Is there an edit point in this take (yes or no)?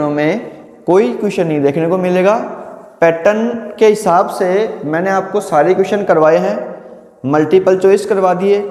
no